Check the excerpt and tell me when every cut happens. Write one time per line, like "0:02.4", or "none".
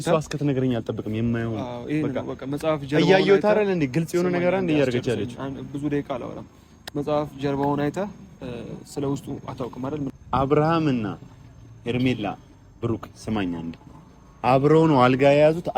0:10.1